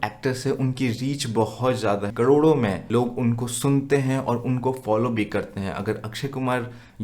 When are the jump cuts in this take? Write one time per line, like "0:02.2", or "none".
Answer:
0:02.1
0:02.8